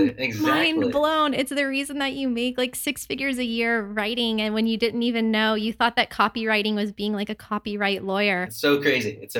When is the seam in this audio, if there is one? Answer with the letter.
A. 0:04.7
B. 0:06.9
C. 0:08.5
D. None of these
C